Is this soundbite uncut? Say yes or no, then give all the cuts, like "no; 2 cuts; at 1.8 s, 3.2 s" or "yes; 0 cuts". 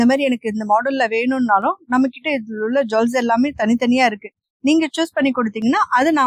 yes; 0 cuts